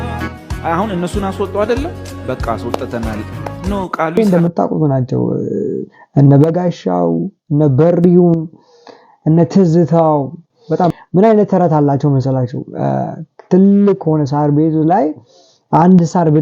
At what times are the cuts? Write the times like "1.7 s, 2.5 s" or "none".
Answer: 4.1 s, 11.0 s